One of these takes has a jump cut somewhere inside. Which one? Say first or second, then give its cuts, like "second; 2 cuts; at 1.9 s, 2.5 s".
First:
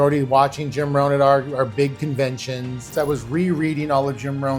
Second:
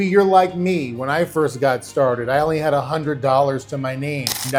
first; 1 cut; at 2.9 s